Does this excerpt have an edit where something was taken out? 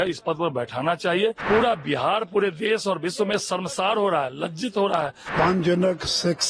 yes; 2 cuts; at 1.4 s, 5.2 s

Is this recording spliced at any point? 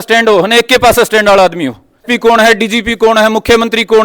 yes; 1 cut; at 2.0 s

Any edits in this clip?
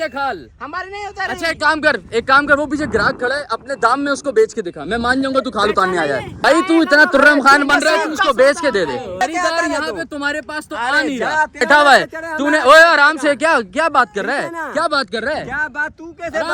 yes; 3 cuts; at 6.4 s, 9.2 s, 11.6 s

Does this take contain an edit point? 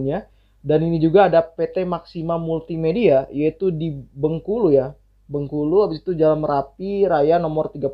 no; 0 cuts

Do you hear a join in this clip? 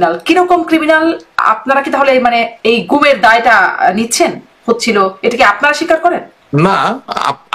no; 0 cuts

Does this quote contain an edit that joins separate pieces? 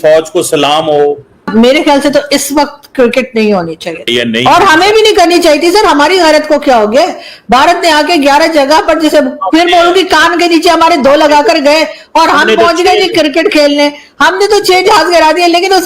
yes; 2 cuts; at 1.4 s, 4.1 s

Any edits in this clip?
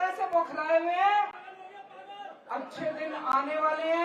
no; 0 cuts

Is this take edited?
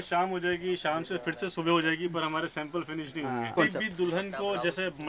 yes; 1 cut; at 3.5 s

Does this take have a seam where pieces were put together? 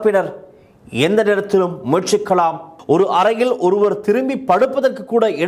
yes; 1 cut; at 2.7 s

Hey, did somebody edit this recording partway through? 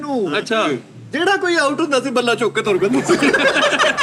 no; 0 cuts

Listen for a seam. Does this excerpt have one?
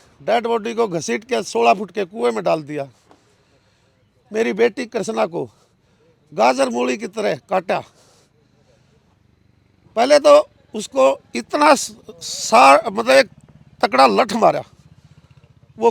no; 0 cuts

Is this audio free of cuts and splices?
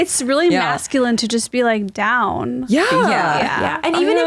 yes; 0 cuts

